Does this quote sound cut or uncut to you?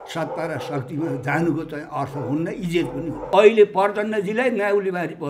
cut